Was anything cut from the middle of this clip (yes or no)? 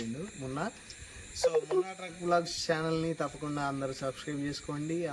no